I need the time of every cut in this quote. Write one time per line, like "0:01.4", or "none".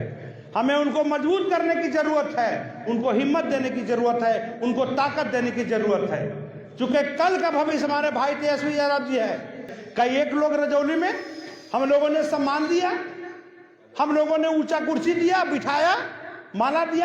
0:09.7